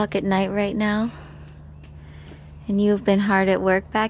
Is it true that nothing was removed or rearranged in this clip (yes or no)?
yes